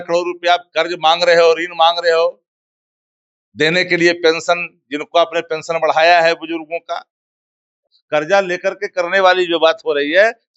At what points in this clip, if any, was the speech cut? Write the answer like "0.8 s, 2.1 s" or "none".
7.9 s